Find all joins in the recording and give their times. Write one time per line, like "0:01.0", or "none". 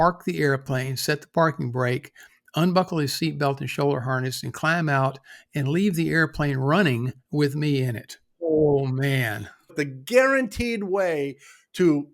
0:08.4
0:09.7